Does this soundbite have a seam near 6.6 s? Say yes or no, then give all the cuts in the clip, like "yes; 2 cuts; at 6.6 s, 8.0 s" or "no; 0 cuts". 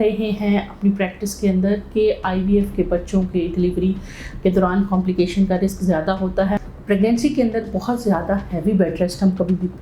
yes; 1 cut; at 6.6 s